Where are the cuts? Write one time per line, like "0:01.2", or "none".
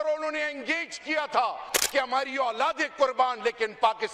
0:01.8